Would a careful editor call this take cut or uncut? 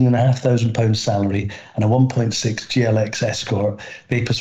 uncut